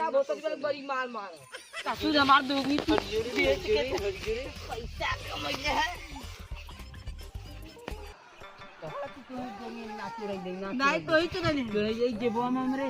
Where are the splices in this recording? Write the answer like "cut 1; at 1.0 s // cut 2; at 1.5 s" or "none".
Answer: cut 1; at 2.0 s // cut 2; at 8.1 s